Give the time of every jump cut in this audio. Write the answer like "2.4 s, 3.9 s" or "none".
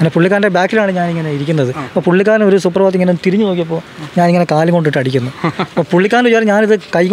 none